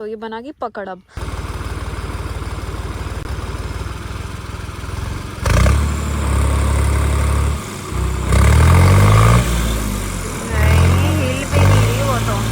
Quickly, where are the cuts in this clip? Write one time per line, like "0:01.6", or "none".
0:01.3